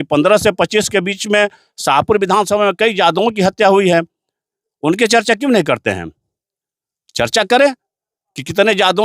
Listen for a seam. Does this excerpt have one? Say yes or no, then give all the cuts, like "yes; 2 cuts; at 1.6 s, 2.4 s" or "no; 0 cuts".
no; 0 cuts